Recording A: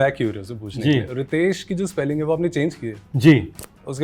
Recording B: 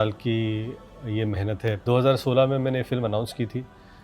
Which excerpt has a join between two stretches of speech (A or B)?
B